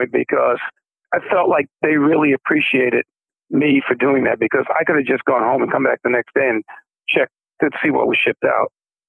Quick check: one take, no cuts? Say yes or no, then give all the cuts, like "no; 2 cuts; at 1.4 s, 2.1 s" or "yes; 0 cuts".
yes; 0 cuts